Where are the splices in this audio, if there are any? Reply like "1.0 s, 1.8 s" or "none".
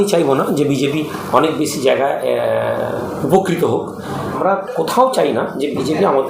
4.4 s